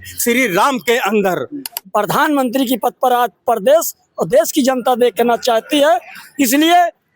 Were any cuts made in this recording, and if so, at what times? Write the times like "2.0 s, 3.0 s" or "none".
1.7 s